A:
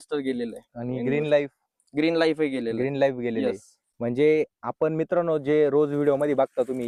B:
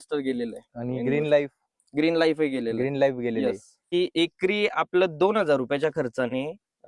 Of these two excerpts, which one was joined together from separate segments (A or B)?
B